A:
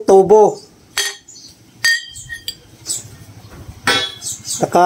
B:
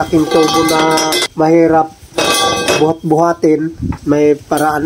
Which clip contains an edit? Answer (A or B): B